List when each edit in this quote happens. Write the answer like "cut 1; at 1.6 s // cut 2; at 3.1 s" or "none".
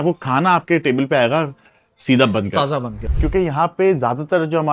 cut 1; at 3.0 s